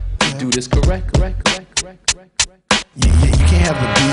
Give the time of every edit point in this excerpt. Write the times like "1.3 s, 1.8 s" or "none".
none